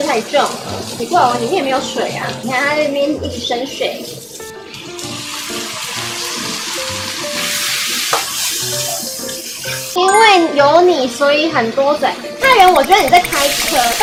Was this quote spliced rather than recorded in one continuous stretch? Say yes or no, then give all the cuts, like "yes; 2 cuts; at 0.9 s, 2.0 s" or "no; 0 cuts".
no; 0 cuts